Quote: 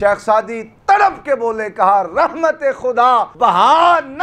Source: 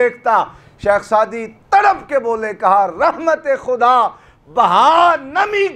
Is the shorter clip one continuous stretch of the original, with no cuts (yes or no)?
no